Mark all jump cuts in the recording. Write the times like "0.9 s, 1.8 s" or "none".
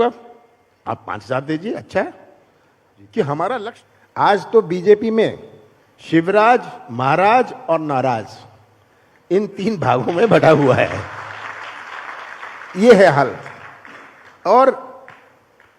3.7 s